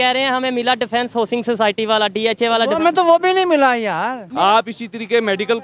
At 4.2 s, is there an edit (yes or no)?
yes